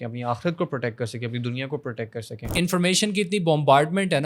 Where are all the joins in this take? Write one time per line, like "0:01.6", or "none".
0:02.5